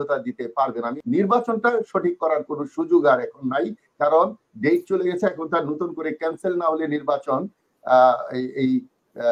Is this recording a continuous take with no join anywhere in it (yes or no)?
no